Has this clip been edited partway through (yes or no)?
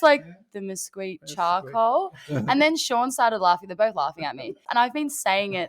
yes